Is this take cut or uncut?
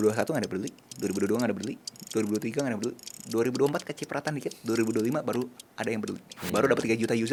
uncut